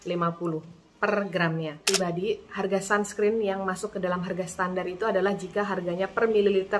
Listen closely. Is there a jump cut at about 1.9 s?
yes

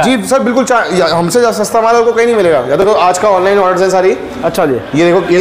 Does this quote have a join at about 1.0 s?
no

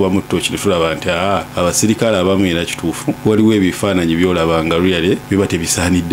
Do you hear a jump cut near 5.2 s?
yes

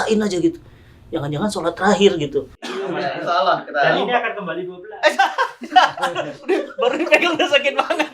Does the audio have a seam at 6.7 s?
no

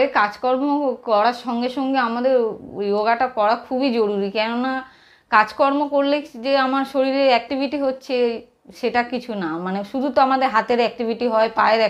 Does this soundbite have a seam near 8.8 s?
no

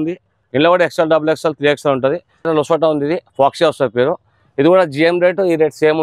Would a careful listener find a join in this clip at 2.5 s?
yes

